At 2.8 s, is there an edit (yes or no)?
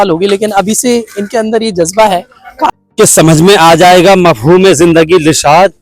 yes